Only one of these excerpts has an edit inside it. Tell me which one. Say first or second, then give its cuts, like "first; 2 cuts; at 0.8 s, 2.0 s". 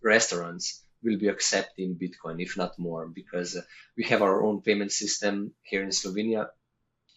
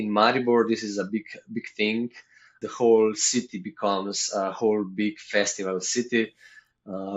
second; 1 cut; at 2.6 s